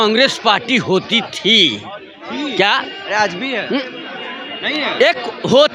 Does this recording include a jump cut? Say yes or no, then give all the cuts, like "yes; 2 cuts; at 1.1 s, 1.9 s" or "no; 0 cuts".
no; 0 cuts